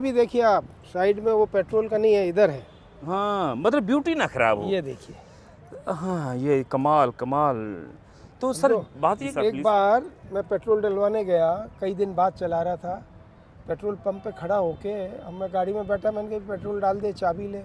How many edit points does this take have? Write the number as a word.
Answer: one